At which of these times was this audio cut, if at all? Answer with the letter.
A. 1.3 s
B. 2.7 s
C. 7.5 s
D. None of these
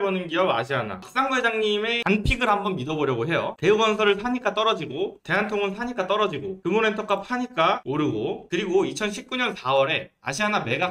D